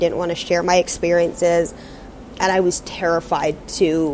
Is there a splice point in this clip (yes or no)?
no